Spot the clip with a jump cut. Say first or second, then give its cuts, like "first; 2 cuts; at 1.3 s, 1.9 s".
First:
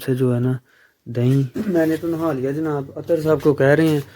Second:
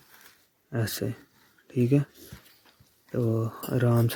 first; 1 cut; at 1.5 s